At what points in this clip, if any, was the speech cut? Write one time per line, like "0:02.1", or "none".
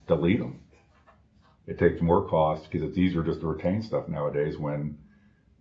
none